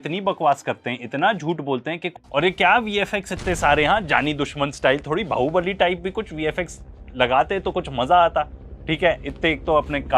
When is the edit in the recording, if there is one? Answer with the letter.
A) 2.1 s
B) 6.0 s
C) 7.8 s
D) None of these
A